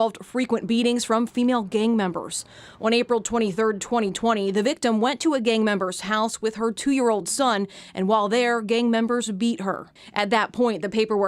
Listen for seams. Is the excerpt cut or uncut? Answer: uncut